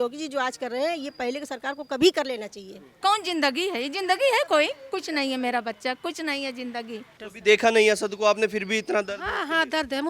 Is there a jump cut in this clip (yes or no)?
yes